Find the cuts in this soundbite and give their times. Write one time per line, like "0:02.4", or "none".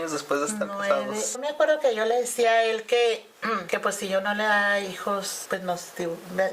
0:01.4
0:03.6
0:05.4